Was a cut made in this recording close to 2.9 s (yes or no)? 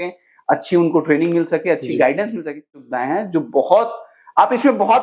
yes